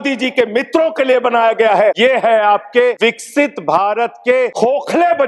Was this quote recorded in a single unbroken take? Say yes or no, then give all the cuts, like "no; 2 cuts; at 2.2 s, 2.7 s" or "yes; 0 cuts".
no; 3 cuts; at 2.0 s, 3.0 s, 4.5 s